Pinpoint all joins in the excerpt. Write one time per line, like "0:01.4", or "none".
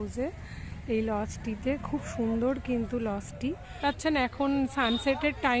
0:03.8